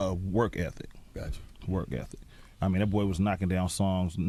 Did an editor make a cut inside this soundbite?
no; 0 cuts

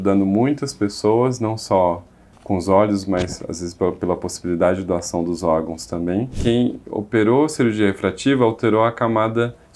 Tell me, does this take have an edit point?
yes; 1 cut; at 6.3 s

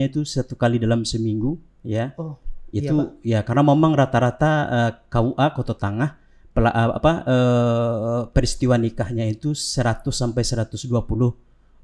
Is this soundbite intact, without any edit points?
yes; 0 cuts

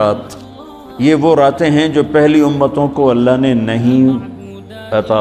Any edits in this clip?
no; 0 cuts

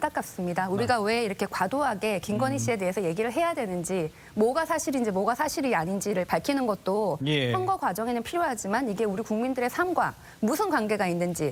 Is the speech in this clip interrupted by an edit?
no; 0 cuts

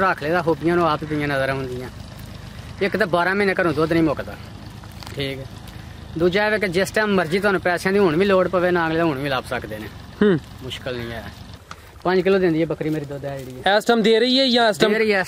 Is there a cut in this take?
yes; 1 cut; at 11.7 s

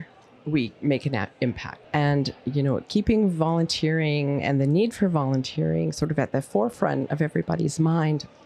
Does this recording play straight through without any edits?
no; 2 cuts; at 1.7 s, 7.1 s

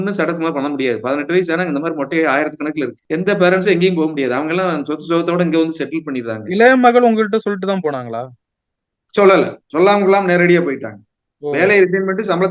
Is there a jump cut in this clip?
yes; 1 cut; at 3.0 s

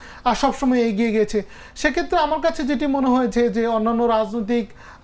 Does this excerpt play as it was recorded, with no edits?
yes; 0 cuts

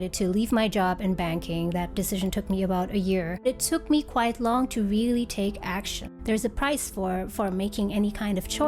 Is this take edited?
yes; 2 cuts; at 3.4 s, 6.2 s

